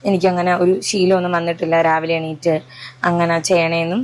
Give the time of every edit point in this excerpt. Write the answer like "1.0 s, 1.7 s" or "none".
none

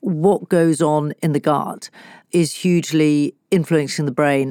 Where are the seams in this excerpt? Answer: 2.2 s

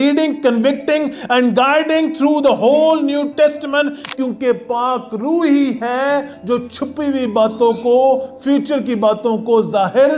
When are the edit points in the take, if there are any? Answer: 4.0 s

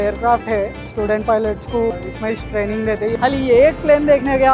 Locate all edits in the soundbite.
1.9 s, 3.2 s

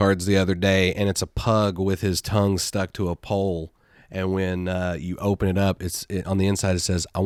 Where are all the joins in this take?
none

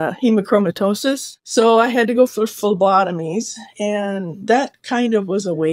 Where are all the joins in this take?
1.4 s

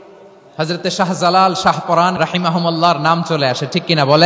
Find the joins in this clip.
2.1 s

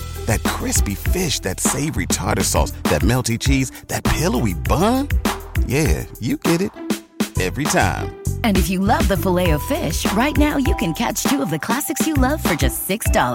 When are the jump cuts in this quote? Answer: none

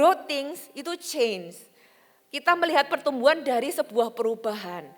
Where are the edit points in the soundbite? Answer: none

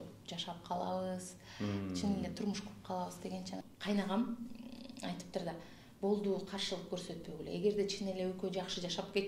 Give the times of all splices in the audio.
3.6 s

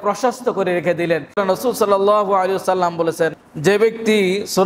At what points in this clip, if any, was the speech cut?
1.4 s, 3.4 s

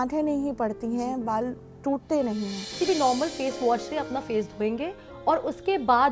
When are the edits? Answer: 2.7 s

